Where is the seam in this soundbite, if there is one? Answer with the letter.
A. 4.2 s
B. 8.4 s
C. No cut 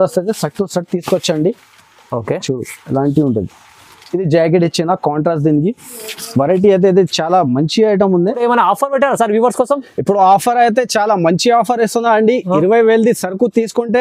B